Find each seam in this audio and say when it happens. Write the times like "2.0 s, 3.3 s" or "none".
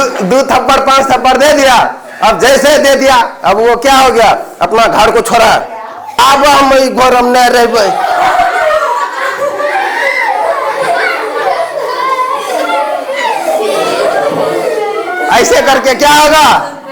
6.2 s